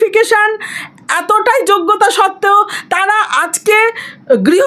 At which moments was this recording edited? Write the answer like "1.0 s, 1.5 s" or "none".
none